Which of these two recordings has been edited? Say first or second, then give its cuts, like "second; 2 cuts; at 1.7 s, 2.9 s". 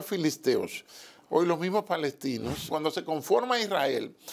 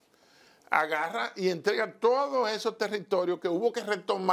first; 1 cut; at 2.7 s